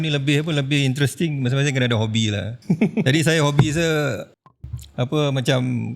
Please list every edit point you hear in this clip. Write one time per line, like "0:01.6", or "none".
0:02.5